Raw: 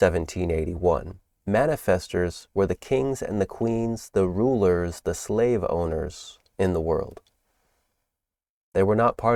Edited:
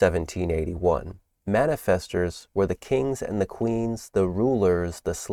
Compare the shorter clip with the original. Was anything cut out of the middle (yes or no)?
no